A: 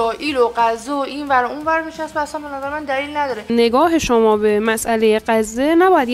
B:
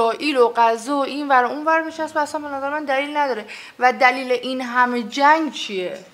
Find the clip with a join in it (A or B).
A